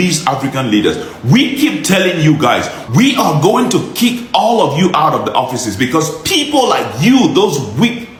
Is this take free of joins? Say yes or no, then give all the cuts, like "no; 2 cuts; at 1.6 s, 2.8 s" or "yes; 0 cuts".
yes; 0 cuts